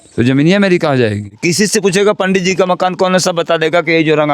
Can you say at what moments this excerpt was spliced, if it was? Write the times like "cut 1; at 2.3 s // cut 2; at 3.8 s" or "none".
cut 1; at 1.3 s